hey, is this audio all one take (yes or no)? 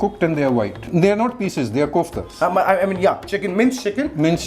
no